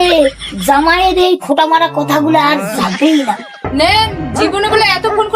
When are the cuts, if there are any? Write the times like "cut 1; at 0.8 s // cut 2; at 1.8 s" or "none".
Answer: cut 1; at 3.7 s